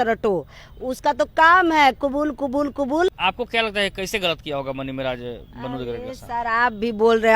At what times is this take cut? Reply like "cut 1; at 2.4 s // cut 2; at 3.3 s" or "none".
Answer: cut 1; at 3.2 s